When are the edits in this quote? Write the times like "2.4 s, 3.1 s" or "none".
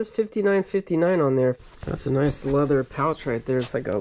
1.6 s